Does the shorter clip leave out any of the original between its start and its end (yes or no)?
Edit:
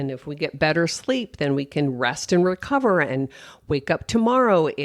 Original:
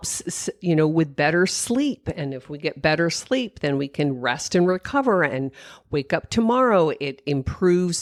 no